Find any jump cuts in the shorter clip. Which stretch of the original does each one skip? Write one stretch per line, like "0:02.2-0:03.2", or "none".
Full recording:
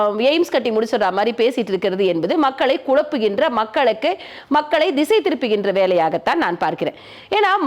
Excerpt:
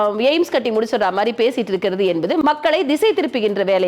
0:02.4-0:04.5